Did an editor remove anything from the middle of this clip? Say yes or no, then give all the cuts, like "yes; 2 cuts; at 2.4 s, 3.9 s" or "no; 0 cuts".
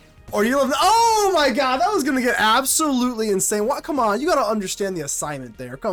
no; 0 cuts